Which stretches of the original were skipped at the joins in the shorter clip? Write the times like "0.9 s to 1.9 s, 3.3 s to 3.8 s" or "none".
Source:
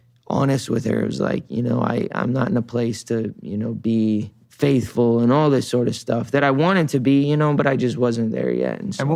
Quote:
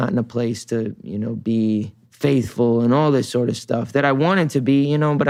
none